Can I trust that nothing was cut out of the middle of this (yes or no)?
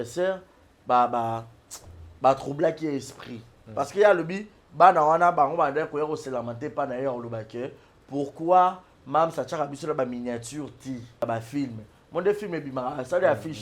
no